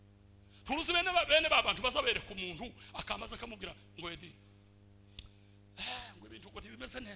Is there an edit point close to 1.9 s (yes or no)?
no